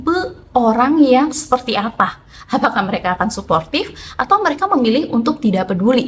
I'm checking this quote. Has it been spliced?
no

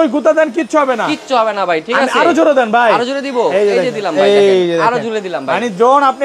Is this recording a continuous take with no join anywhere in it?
yes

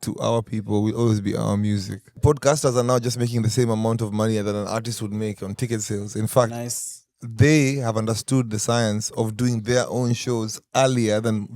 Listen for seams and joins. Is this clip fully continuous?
no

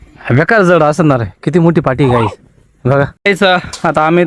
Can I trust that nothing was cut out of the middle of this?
no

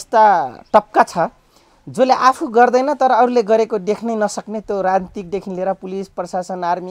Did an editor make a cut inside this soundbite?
no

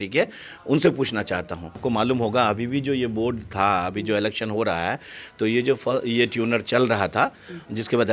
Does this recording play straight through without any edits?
no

